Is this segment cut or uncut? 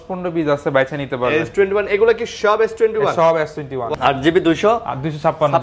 cut